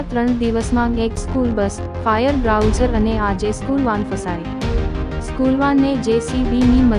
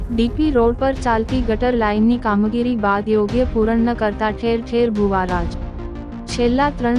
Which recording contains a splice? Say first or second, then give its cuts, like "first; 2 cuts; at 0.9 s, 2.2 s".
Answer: first; 2 cuts; at 4.1 s, 5.3 s